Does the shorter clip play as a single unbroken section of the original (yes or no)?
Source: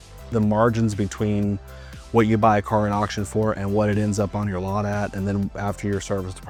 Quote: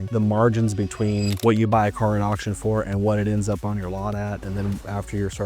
no